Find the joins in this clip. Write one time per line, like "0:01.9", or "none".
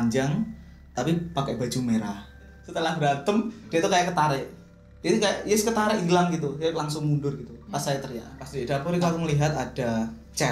0:02.6
0:08.5